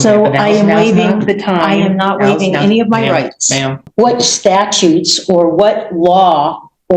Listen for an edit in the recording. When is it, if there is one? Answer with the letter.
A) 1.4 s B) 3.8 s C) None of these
B